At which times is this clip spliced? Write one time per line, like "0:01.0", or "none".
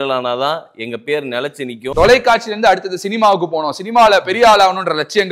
0:01.8